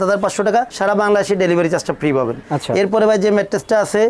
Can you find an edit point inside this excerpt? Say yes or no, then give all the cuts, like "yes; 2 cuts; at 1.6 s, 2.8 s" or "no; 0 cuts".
no; 0 cuts